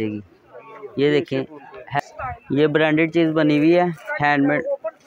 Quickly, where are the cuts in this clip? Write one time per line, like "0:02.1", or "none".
0:02.0